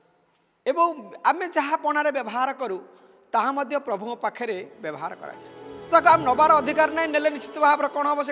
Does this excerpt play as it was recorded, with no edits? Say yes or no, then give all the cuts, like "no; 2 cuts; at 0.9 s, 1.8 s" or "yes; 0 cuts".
no; 1 cut; at 5.8 s